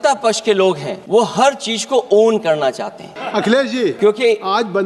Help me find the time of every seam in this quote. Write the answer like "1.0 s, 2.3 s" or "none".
0.9 s, 3.1 s, 4.0 s